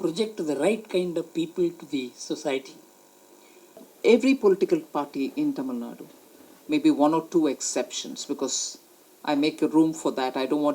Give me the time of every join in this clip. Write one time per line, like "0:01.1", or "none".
0:03.9